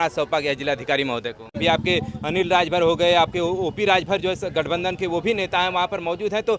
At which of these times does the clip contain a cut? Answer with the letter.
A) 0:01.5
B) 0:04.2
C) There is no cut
A